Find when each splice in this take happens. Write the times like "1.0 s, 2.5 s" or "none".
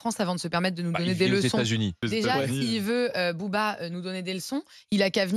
2.0 s